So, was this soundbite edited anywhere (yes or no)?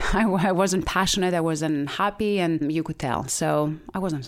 no